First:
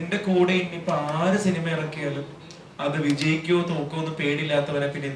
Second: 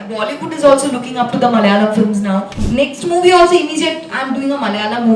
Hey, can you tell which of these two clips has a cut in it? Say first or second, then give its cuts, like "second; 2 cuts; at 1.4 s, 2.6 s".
second; 1 cut; at 2.6 s